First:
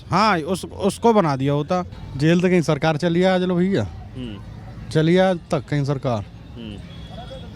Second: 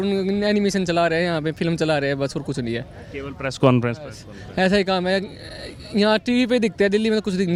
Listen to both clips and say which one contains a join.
first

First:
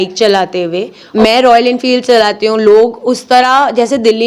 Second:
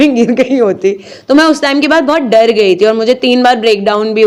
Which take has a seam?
first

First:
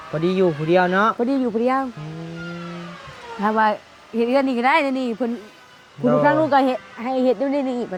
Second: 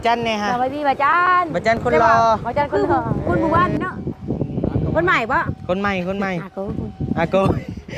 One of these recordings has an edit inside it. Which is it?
second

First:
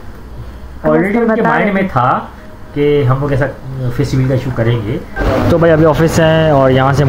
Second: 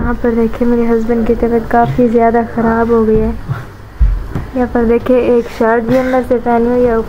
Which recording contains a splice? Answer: first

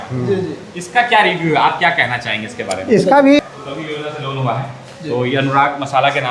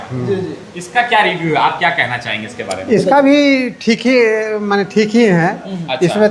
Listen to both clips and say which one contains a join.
first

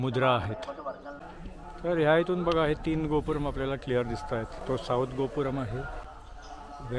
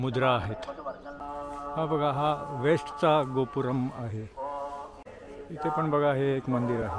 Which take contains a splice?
first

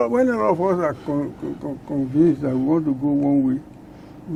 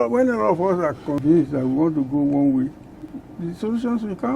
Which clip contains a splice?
second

